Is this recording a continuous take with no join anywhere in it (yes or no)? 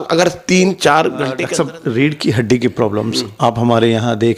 no